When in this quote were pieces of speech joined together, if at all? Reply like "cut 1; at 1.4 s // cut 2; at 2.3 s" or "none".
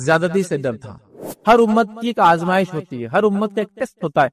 cut 1; at 1.2 s